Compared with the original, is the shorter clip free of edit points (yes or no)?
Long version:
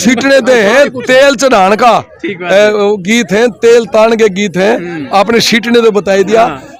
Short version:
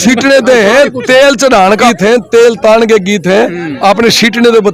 no